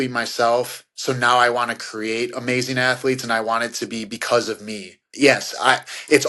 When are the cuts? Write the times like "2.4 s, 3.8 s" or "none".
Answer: none